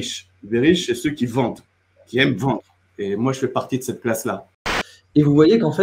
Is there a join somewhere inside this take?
yes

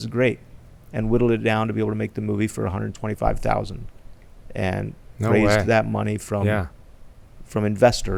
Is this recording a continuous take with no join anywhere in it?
yes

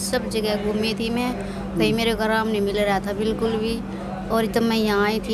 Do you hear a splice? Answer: no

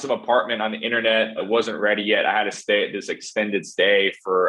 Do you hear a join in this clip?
no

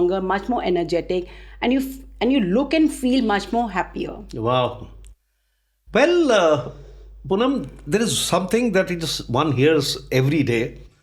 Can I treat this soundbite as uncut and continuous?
yes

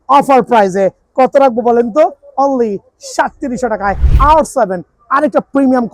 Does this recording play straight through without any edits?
no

